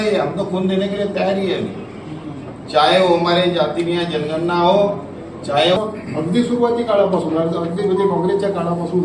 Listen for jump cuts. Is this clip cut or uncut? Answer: cut